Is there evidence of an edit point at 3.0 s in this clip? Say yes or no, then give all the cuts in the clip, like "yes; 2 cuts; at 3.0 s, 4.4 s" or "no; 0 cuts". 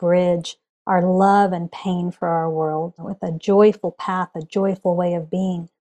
yes; 1 cut; at 3.0 s